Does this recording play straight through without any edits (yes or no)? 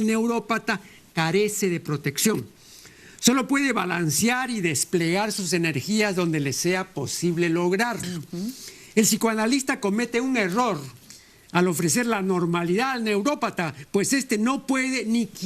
yes